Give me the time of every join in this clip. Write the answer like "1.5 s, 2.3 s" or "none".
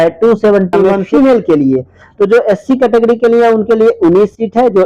1.0 s